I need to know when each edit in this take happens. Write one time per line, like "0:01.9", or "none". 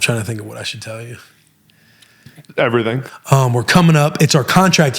0:02.3
0:03.0

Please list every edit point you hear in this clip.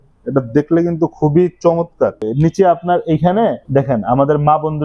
0:02.3
0:03.6

